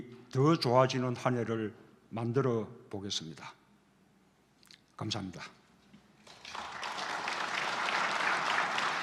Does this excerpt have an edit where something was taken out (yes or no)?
no